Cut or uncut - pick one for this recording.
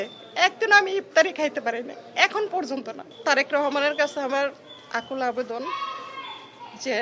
cut